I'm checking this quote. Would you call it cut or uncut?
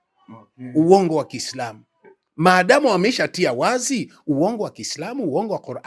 uncut